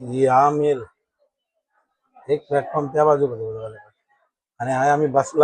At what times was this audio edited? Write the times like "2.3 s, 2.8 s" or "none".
2.0 s